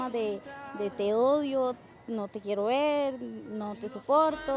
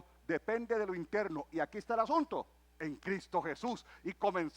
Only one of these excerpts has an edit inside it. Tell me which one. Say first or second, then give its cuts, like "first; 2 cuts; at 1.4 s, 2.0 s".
second; 1 cut; at 2.7 s